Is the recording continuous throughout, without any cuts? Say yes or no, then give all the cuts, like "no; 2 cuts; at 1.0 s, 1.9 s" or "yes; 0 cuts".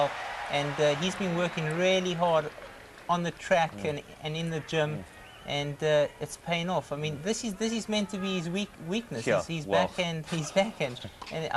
no; 1 cut; at 7.7 s